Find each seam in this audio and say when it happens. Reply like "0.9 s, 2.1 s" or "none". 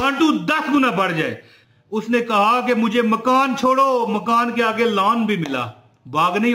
1.5 s